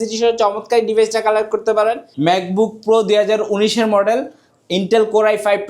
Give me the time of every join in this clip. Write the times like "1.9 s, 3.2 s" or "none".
2.1 s